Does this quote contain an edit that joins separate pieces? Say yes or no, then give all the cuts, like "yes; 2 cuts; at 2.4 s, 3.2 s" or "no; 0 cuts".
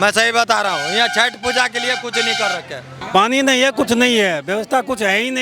yes; 1 cut; at 2.9 s